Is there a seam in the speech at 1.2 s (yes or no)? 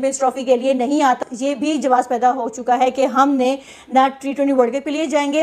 yes